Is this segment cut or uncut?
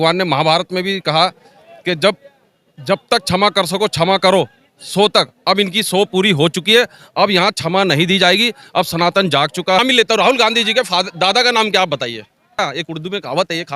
cut